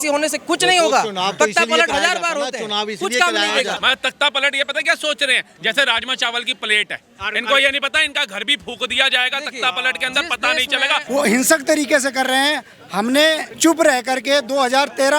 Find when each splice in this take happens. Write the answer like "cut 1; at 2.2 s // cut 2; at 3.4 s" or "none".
cut 1; at 3.8 s // cut 2; at 11.0 s // cut 3; at 13.5 s